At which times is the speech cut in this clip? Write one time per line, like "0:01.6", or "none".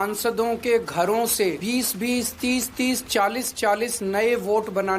0:01.6